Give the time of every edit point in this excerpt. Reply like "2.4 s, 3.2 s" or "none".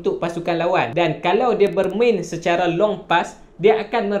0.9 s